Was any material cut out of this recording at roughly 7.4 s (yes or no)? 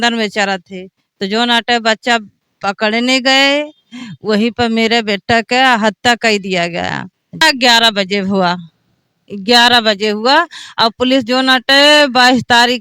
yes